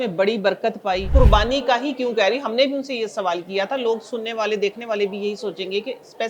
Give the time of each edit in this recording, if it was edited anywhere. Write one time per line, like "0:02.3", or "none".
0:01.1